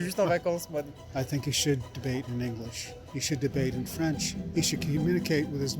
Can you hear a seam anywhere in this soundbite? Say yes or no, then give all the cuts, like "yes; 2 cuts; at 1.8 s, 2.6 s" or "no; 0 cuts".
yes; 1 cut; at 0.9 s